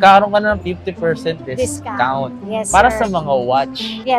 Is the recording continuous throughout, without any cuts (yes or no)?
yes